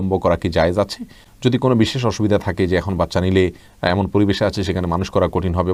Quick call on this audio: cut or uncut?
uncut